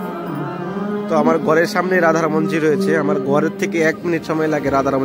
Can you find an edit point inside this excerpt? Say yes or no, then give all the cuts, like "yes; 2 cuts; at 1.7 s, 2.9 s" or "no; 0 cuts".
no; 0 cuts